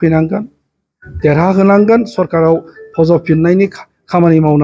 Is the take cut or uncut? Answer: uncut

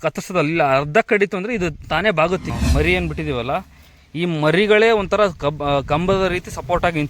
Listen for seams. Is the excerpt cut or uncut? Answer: cut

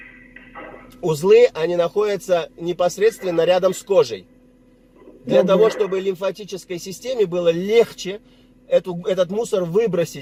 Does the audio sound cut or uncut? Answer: uncut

